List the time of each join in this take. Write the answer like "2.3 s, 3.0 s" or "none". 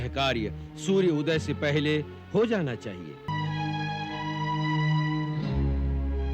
3.3 s